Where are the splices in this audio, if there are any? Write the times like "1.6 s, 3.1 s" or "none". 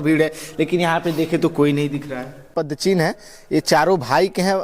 2.5 s